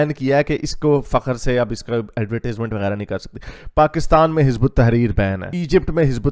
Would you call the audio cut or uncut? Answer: uncut